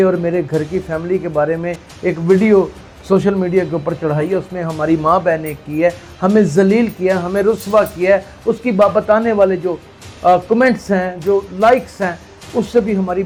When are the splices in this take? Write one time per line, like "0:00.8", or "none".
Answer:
none